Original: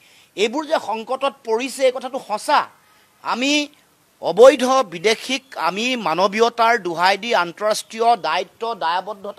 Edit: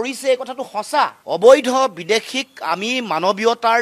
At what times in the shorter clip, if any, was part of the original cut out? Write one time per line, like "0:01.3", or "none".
0:01.2

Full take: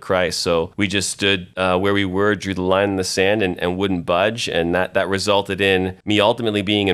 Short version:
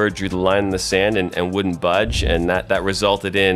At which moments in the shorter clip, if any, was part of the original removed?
none

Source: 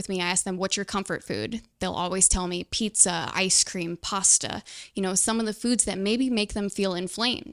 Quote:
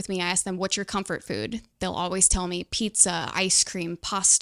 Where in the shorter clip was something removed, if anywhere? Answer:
none

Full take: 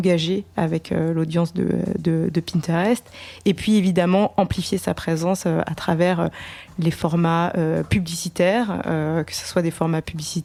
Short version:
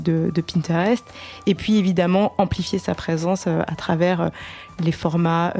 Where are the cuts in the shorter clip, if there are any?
none

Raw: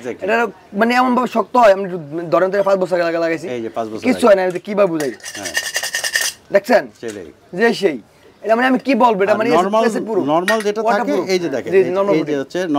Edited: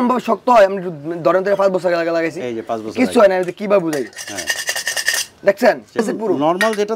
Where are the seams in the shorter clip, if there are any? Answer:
0:06.0

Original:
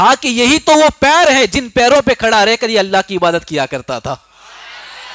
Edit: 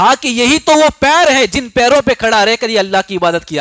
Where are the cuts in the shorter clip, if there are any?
none

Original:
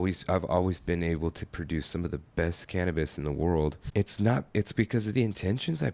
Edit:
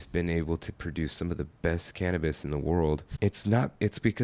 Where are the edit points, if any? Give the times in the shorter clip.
none

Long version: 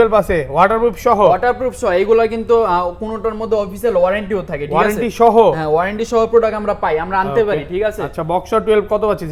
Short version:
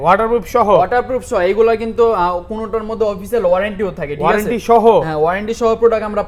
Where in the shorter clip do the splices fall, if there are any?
none

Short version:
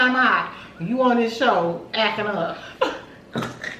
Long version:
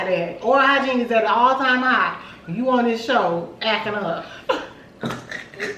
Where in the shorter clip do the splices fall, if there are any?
none

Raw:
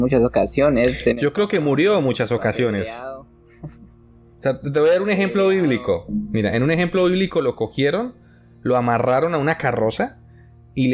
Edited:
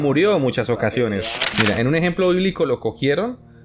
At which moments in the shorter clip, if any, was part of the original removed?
0:01.5

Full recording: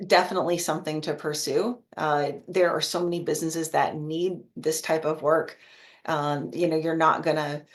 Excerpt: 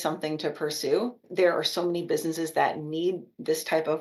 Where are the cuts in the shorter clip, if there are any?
0:01.2

